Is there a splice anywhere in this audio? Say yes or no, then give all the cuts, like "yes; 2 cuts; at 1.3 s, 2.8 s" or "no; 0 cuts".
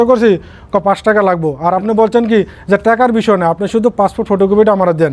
no; 0 cuts